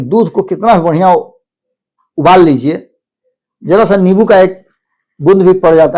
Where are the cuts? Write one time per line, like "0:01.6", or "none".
none